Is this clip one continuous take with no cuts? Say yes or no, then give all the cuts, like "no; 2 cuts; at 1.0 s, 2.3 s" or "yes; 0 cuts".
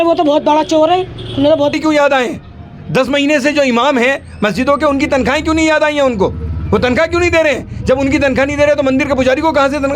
no; 1 cut; at 1.7 s